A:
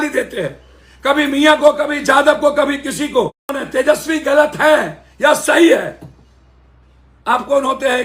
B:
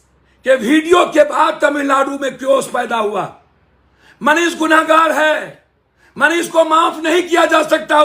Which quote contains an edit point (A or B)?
A